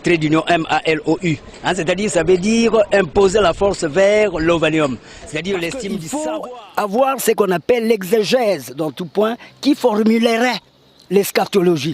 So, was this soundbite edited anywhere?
yes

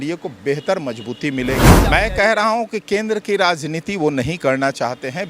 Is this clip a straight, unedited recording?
no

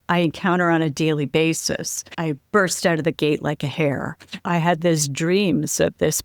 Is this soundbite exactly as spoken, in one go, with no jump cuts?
no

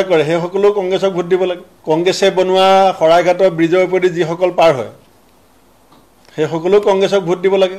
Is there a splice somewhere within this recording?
yes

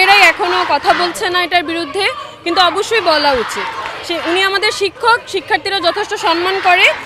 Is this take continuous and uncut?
yes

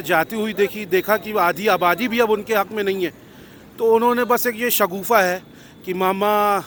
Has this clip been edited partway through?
no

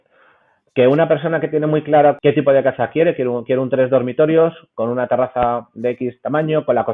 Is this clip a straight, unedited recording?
no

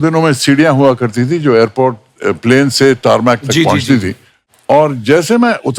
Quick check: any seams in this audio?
no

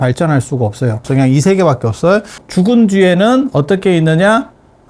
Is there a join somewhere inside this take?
yes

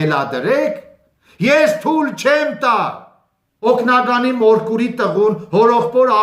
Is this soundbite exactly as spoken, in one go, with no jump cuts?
no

